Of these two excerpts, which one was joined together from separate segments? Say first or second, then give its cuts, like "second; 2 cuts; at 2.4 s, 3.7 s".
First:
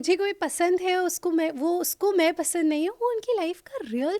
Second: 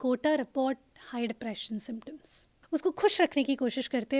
second; 1 cut; at 2.5 s